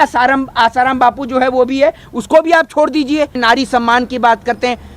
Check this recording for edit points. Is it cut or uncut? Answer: cut